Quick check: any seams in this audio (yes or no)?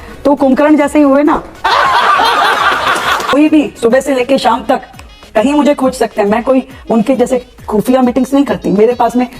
yes